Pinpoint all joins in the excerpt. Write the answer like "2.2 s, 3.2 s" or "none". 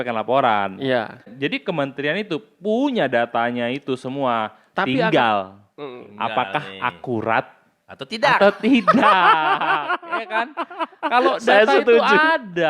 1.3 s